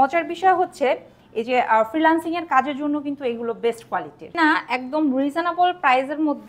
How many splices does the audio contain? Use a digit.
1